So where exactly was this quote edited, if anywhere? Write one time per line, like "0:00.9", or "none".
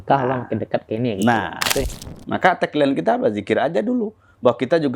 0:01.9